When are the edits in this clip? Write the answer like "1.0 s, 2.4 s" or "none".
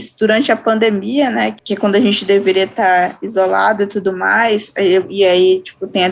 1.6 s